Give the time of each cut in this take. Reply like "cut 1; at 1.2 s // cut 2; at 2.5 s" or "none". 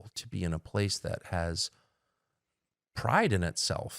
none